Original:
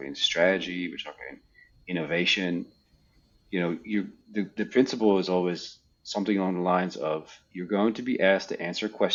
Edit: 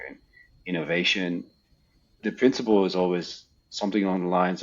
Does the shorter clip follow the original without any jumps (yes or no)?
no